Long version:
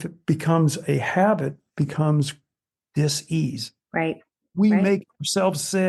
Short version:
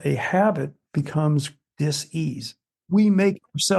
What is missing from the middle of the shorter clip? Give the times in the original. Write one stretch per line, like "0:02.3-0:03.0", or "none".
0:02.4-0:02.8
0:03.8-0:04.3